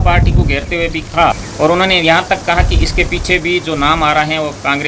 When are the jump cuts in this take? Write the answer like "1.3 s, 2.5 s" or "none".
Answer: 1.5 s

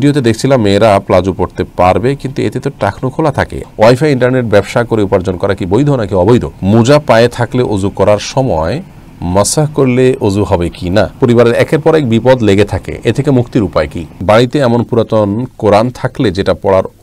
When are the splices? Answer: 3.6 s, 6.5 s, 11.2 s, 14.1 s

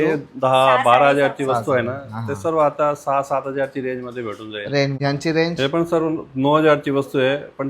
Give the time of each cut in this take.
5.0 s

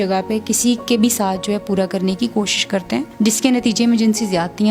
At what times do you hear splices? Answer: none

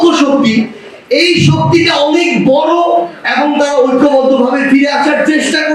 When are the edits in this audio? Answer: none

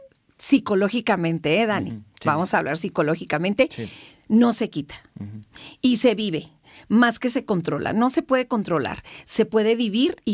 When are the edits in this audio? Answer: none

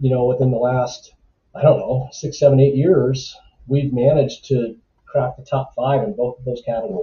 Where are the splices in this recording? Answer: none

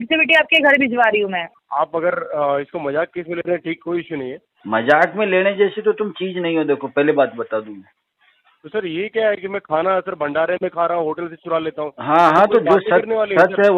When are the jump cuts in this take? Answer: 1.4 s, 4.5 s

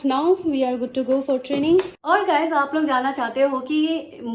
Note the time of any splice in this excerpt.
2.0 s

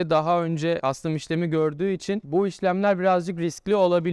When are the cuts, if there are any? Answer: none

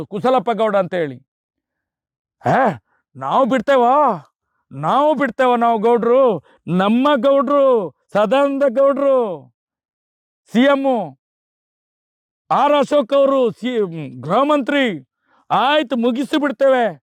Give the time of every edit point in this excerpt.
none

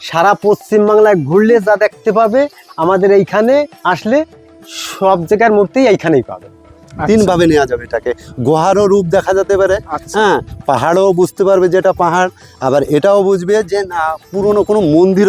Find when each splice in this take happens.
6.8 s

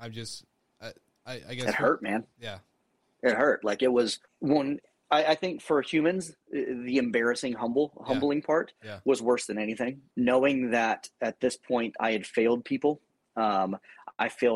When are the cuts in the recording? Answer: 4.3 s, 10.0 s

